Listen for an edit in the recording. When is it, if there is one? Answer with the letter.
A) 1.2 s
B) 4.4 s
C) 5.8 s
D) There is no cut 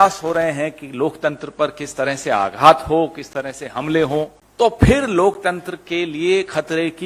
B